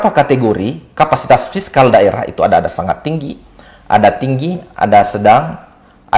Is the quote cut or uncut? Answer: uncut